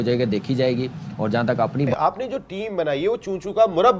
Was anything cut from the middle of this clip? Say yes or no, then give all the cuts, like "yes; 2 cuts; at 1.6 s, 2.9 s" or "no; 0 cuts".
yes; 1 cut; at 1.9 s